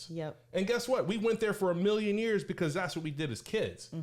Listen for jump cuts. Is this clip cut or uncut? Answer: uncut